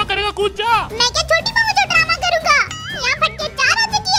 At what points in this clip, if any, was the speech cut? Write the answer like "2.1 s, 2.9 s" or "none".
none